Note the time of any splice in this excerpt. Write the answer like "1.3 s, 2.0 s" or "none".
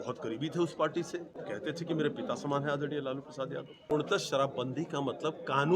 1.4 s, 3.8 s